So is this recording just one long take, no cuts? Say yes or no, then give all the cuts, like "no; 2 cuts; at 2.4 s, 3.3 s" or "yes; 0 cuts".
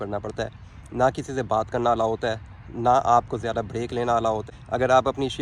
no; 1 cut; at 4.5 s